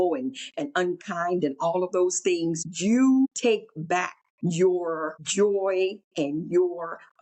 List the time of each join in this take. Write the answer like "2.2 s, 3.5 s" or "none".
2.7 s, 3.8 s, 5.2 s, 6.0 s